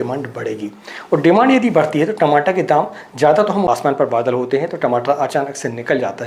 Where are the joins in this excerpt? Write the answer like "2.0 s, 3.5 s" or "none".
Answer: 3.7 s